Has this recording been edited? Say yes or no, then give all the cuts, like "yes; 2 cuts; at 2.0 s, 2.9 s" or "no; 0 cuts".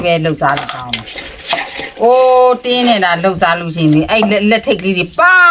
no; 0 cuts